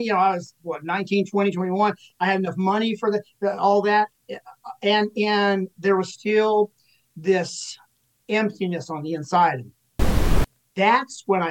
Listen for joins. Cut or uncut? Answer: cut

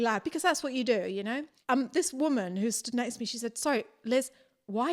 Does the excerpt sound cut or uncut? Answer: cut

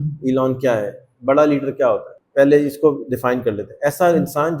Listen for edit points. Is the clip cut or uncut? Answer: cut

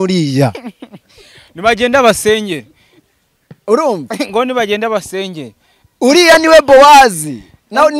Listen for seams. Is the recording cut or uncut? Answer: uncut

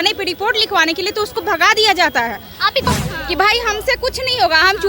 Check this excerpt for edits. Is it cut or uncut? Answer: cut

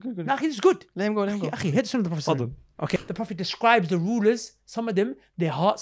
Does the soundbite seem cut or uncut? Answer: cut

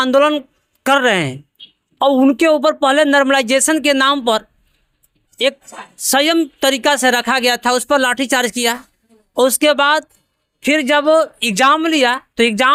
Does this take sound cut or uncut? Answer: uncut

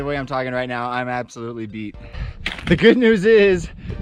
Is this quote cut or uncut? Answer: cut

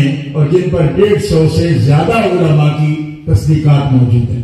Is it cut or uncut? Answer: uncut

